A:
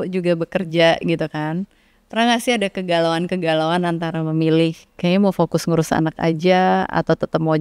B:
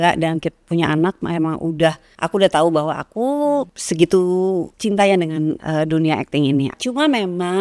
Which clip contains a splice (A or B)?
B